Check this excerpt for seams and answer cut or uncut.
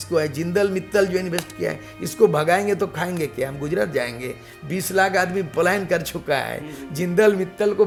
uncut